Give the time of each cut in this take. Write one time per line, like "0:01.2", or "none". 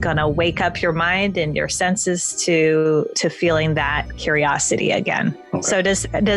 0:05.4